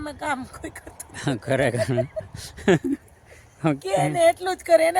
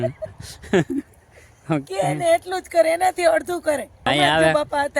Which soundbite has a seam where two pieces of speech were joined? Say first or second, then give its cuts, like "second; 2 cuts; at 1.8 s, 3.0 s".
second; 1 cut; at 4.1 s